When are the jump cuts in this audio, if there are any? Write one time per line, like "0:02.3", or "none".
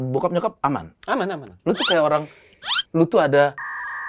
0:01.5